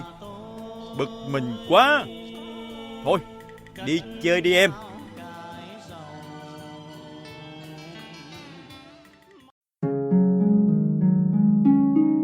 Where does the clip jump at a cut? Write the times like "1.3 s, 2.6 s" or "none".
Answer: 9.5 s

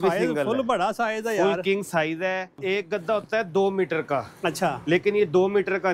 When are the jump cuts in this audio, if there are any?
2.6 s

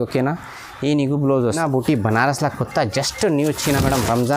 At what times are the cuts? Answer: 1.6 s

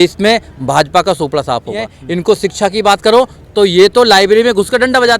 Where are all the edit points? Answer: 1.9 s

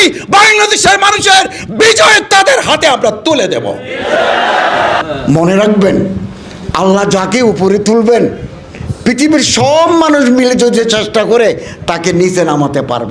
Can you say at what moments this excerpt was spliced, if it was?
5.0 s

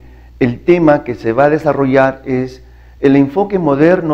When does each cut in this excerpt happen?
1.3 s

